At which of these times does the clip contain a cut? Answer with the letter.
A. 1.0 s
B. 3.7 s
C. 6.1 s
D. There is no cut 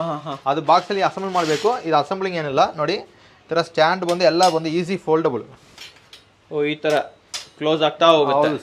D